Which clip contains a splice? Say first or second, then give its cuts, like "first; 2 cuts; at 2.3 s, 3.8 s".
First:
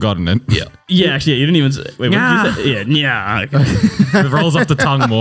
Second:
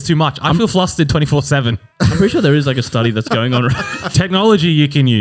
second; 1 cut; at 4.0 s